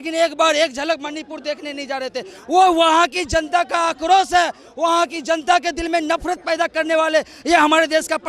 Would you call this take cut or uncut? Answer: uncut